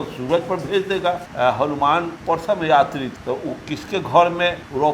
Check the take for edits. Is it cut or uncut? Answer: cut